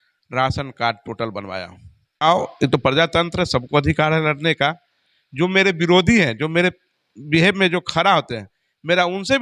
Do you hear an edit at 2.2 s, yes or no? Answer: yes